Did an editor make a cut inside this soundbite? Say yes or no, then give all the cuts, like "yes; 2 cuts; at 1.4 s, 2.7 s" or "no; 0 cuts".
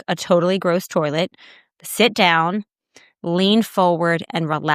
no; 0 cuts